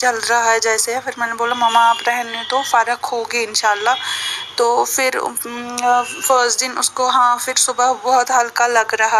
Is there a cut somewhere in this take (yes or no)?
no